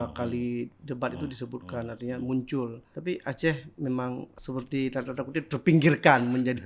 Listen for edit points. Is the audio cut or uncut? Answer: cut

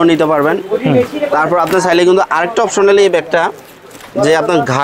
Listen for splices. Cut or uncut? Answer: uncut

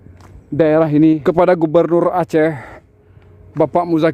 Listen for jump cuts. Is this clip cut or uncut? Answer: cut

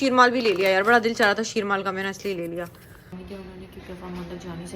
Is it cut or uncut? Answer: cut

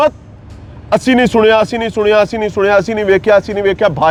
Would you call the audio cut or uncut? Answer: uncut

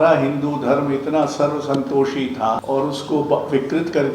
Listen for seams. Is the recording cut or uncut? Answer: cut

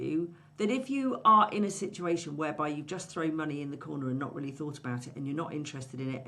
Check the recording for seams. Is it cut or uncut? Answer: uncut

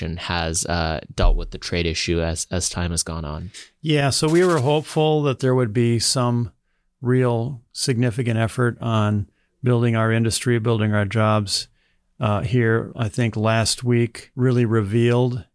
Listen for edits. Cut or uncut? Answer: cut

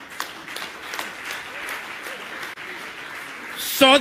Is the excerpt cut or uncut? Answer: uncut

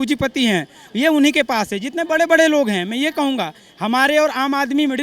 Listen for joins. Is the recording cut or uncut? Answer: uncut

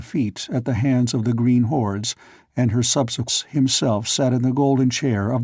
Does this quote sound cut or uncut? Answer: uncut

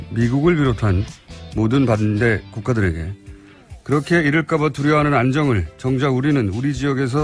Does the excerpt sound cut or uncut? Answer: cut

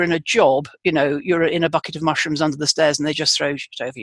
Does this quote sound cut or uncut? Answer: uncut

